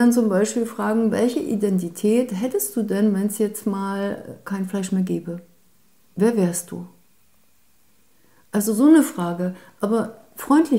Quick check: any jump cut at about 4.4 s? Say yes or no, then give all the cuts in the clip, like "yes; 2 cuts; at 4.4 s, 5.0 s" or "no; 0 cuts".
yes; 1 cut; at 4.4 s